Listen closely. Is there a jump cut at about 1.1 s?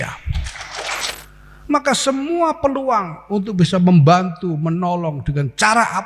yes; 1 cut; at 1.1 s

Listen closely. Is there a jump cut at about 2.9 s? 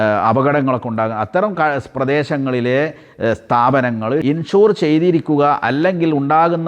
no; 1 cut; at 4.2 s

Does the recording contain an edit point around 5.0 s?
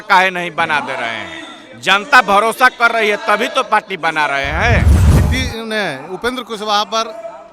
yes; 1 cut; at 5.0 s

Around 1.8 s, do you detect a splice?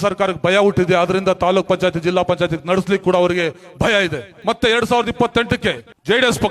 no; 1 cut; at 4.3 s

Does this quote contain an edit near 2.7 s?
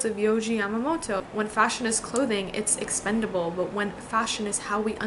no; 1 cut; at 1.2 s

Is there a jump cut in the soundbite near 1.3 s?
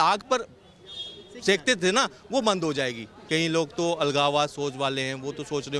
no; 1 cut; at 3.2 s

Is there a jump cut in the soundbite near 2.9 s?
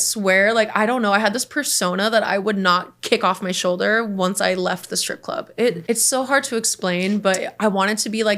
yes; 2 cuts; at 2.9 s, 5.8 s

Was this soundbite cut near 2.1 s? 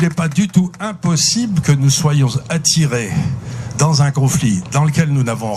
no; 0 cuts

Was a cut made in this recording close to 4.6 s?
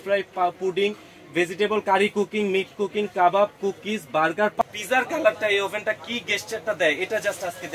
yes; 1 cut; at 4.6 s

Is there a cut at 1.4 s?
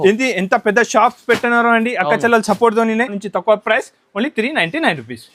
no; 1 cut; at 3.2 s

